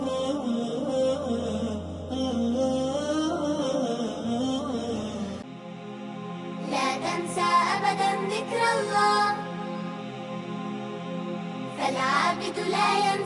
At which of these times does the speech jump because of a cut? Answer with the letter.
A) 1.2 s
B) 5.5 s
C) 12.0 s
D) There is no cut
B